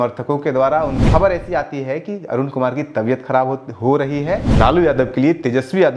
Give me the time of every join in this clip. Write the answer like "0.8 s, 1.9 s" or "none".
1.0 s, 4.5 s